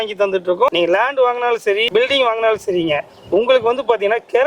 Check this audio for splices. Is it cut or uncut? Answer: cut